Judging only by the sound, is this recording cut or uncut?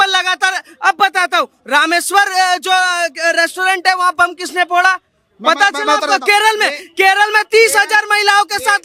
uncut